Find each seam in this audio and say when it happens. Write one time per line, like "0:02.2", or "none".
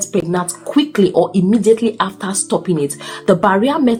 none